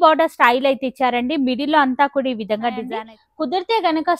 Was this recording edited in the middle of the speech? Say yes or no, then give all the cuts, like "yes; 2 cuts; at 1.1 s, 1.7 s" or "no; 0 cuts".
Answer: yes; 1 cut; at 2.9 s